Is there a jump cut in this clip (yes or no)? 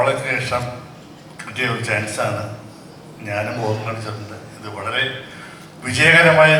no